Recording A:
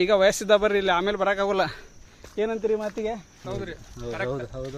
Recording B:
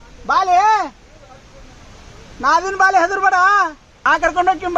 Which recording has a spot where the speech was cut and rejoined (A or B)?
B